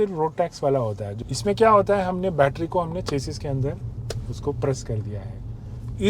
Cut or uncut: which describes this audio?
cut